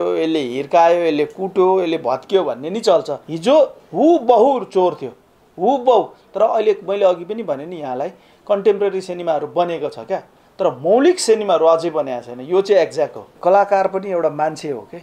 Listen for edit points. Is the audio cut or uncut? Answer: cut